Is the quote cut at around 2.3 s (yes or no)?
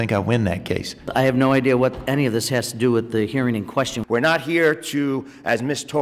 no